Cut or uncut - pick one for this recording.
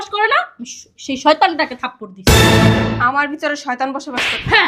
cut